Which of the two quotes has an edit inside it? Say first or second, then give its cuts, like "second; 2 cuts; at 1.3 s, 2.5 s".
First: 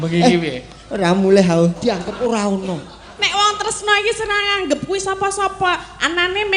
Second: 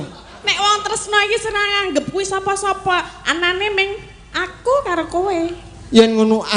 first; 1 cut; at 1.8 s